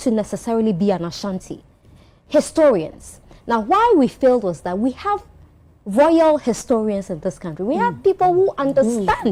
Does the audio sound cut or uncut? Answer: uncut